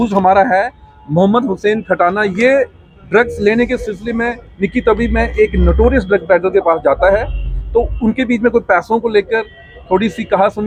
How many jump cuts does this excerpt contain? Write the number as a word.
zero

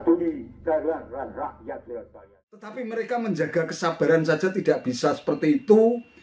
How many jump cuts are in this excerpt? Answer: one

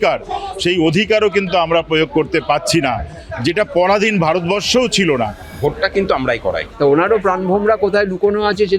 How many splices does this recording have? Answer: two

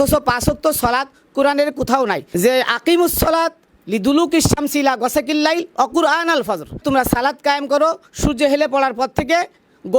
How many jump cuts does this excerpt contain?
two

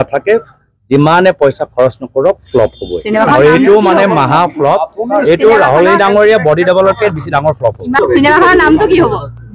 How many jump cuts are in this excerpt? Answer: one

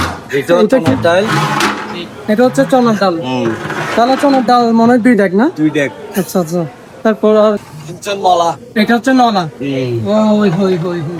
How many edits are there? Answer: zero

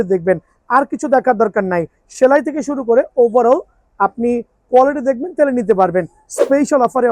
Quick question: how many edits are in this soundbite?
zero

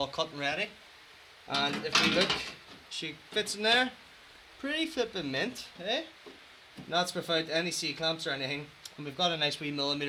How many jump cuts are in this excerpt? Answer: zero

